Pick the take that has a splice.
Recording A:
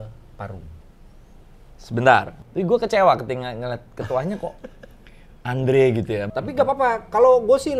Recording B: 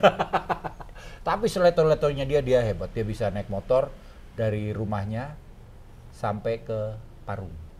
A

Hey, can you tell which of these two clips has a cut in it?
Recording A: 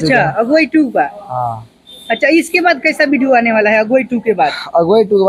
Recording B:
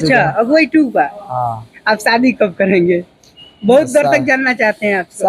B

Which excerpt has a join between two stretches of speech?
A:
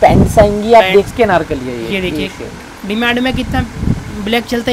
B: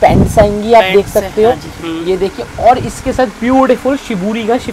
A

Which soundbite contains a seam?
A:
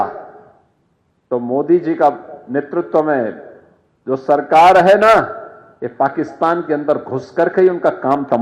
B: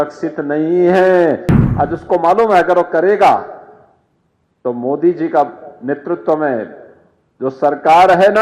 B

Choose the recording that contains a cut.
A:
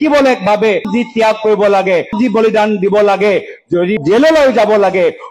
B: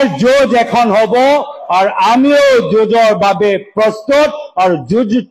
A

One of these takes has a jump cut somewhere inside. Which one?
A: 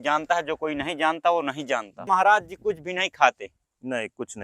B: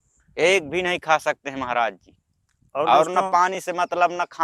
A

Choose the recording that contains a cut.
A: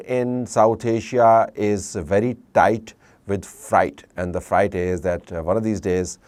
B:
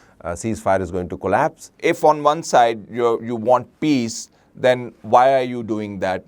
B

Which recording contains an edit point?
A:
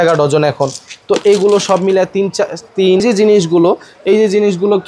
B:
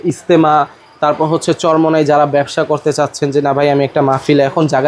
A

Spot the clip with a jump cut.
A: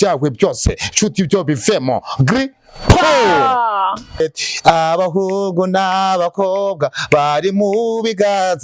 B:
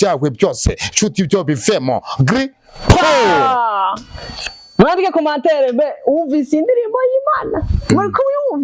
A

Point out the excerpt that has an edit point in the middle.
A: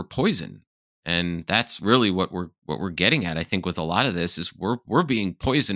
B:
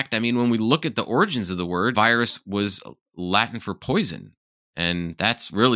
B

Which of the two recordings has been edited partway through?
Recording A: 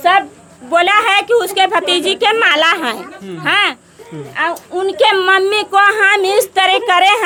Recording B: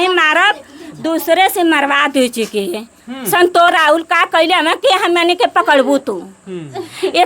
B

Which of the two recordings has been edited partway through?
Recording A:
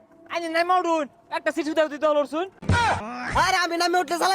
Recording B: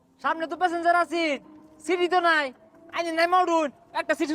A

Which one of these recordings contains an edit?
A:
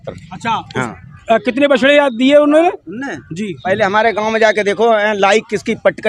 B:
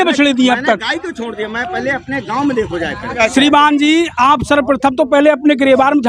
B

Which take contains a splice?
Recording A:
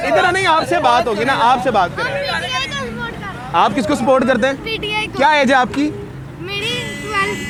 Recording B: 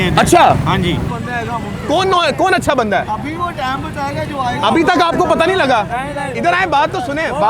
B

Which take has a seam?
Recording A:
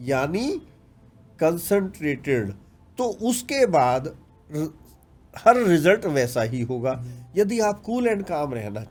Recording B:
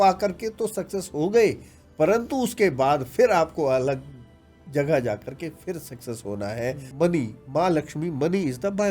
B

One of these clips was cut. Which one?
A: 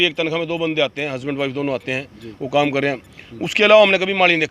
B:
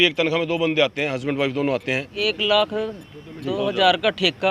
B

